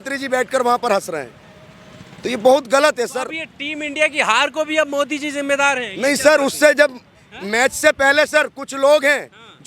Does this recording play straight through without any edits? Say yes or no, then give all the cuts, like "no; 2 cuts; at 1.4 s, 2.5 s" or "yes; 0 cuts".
yes; 0 cuts